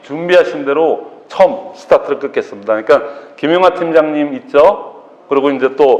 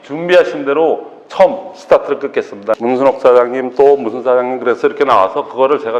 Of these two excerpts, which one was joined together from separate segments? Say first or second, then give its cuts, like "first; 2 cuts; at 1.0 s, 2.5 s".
second; 1 cut; at 2.8 s